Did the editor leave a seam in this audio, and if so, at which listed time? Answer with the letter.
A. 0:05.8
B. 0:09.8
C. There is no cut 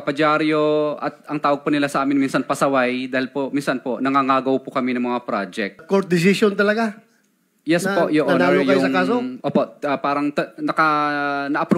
A